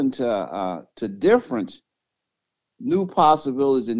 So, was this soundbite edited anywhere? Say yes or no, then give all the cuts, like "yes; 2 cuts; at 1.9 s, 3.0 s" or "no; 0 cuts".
no; 0 cuts